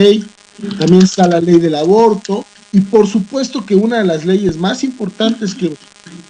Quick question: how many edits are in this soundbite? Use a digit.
1